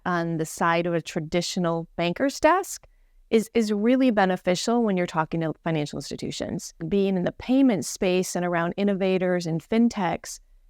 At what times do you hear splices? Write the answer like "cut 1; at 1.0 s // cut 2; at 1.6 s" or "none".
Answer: cut 1; at 6.8 s